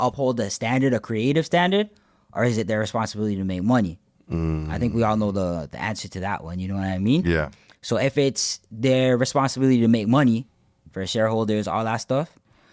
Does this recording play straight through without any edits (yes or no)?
yes